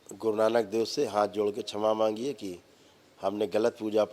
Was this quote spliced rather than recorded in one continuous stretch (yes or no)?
no